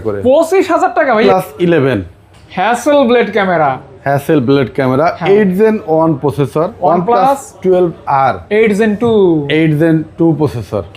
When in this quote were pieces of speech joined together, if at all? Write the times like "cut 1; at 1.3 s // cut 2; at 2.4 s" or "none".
cut 1; at 1.2 s // cut 2; at 6.7 s